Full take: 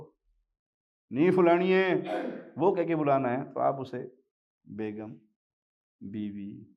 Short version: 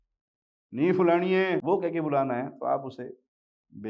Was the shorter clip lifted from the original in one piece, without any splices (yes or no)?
no